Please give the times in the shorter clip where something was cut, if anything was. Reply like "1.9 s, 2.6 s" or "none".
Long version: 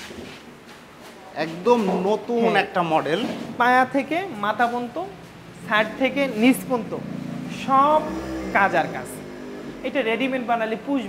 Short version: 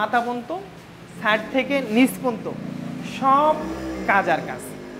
none

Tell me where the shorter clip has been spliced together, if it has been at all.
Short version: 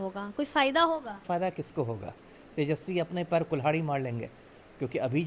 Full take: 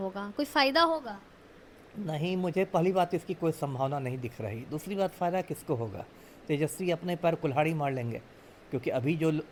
1.2 s

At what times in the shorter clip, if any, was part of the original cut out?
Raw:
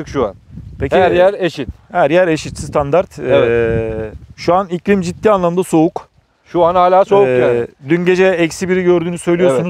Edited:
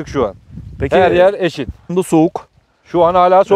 1.9 s

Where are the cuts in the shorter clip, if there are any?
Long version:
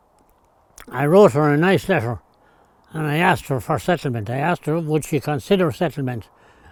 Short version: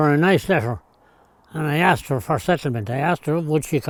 none

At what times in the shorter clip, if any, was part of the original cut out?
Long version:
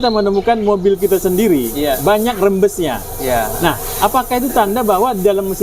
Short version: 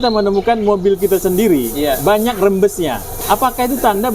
3.1 s

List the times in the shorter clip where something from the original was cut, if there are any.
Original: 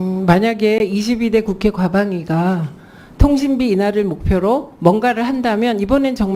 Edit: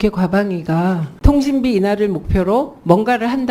1.1 s

